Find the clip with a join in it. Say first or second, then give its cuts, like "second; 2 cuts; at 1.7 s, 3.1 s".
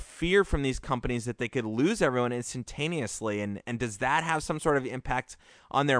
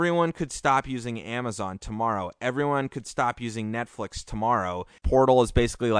second; 1 cut; at 4.9 s